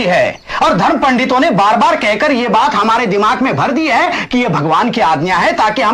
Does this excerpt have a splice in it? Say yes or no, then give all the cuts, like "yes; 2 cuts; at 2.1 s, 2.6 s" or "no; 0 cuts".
no; 0 cuts